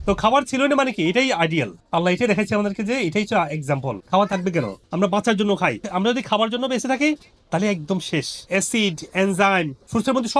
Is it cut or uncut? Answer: cut